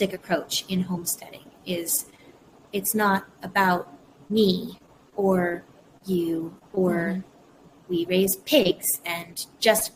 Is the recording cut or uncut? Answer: uncut